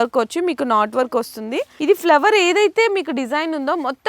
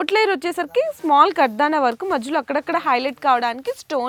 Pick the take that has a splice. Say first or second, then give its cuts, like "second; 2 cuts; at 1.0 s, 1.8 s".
first; 1 cut; at 1.7 s